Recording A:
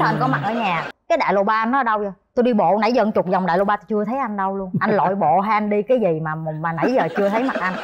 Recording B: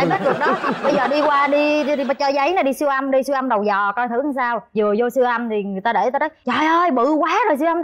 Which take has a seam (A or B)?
A